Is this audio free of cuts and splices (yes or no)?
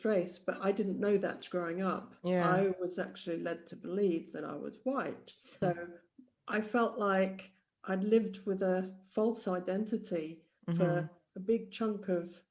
no